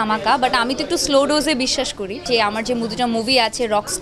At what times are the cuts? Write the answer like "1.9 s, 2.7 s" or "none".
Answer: 2.2 s